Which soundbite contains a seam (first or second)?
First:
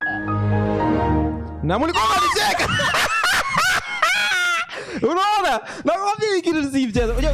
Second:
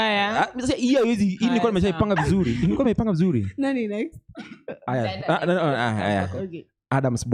first